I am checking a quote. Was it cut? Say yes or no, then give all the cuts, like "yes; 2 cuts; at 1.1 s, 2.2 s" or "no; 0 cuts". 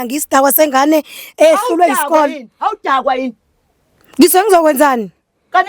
no; 0 cuts